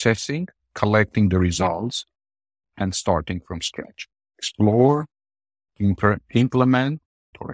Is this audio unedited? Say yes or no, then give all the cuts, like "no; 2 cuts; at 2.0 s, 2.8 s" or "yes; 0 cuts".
yes; 0 cuts